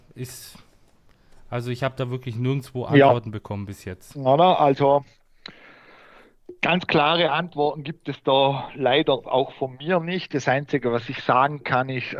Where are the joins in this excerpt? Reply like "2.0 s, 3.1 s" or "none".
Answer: none